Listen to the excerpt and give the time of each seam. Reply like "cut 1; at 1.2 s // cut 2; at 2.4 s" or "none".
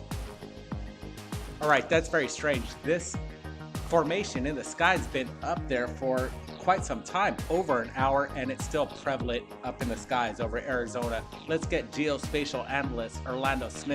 cut 1; at 2.7 s